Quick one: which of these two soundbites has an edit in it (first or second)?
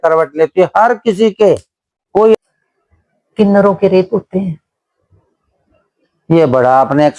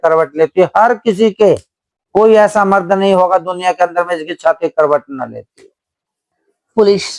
first